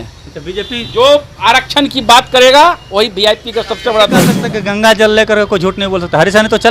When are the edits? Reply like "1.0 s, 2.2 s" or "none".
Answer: 4.4 s